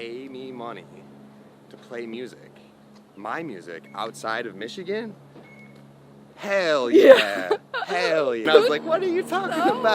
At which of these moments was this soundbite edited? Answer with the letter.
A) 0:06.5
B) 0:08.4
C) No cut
B